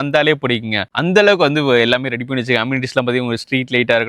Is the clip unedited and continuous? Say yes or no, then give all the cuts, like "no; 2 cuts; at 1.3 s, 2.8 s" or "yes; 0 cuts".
yes; 0 cuts